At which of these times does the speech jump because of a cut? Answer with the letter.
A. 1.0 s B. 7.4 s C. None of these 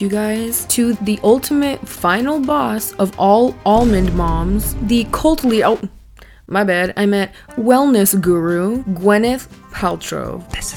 A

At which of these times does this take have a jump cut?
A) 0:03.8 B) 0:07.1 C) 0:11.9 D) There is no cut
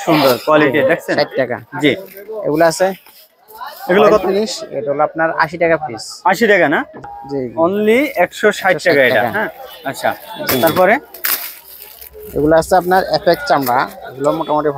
B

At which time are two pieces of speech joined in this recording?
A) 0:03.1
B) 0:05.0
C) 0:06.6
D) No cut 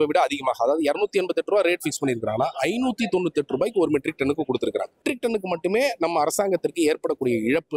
B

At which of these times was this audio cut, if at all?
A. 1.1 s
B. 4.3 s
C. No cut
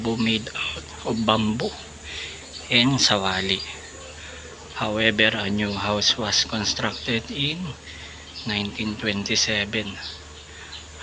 C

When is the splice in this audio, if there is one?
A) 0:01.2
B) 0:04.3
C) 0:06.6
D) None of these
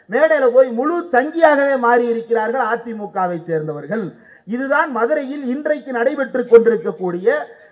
D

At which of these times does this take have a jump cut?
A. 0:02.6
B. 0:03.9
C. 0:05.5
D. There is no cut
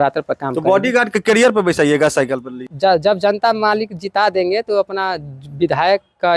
A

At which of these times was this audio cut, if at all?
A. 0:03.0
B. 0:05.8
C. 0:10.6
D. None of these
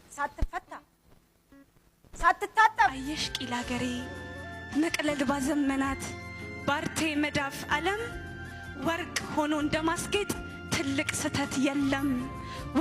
A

